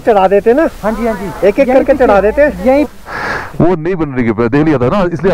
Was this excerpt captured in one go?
no; 1 cut; at 2.9 s

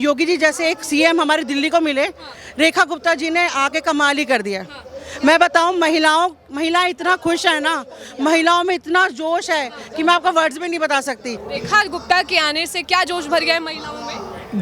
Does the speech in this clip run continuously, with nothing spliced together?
no; 1 cut; at 11.4 s

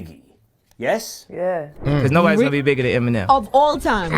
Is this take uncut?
no; 1 cut; at 1.7 s

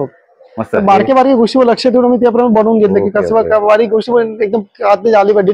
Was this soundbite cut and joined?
no; 0 cuts

